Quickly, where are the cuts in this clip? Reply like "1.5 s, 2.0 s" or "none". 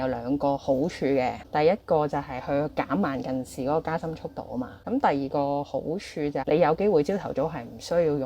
4.7 s, 6.4 s